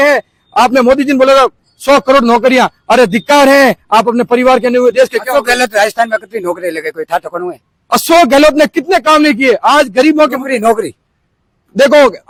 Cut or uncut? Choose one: uncut